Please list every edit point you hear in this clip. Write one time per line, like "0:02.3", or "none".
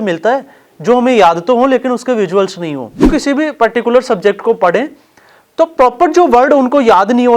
0:03.1